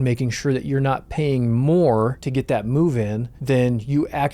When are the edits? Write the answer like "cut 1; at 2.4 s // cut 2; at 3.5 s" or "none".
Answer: cut 1; at 2.2 s // cut 2; at 3.3 s